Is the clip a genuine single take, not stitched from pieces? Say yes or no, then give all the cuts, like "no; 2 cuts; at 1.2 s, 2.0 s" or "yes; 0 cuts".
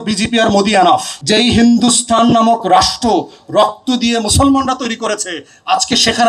no; 1 cut; at 1.1 s